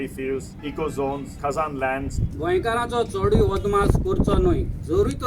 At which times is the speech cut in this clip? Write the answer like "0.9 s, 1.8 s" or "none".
1.0 s, 2.2 s